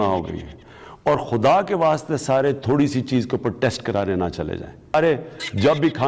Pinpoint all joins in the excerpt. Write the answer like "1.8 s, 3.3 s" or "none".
4.9 s